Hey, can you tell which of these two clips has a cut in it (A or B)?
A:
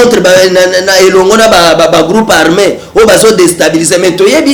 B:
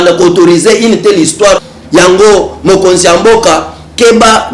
B